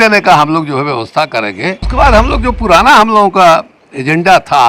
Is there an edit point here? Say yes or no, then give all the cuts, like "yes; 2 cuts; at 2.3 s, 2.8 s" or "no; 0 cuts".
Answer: yes; 1 cut; at 1.8 s